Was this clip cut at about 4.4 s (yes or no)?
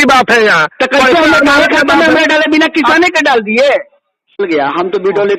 yes